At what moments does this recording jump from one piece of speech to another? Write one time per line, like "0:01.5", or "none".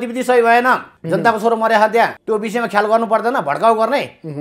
0:00.9
0:02.2